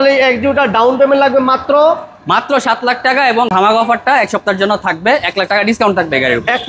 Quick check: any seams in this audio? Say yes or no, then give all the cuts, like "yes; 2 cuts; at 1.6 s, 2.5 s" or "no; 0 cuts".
yes; 1 cut; at 3.5 s